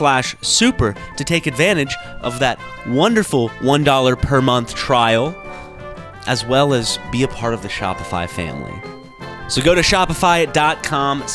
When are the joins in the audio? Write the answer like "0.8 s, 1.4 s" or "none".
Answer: none